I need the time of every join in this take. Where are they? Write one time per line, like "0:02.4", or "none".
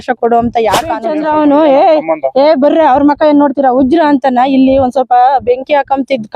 0:01.1